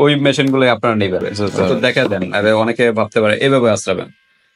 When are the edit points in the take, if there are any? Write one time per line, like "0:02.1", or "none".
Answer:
0:01.3